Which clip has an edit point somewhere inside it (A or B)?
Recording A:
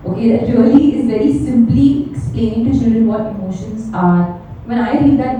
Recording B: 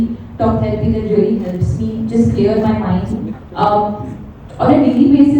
B